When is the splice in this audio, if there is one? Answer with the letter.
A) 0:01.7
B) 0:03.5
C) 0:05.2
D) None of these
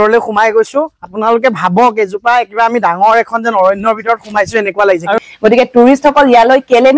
C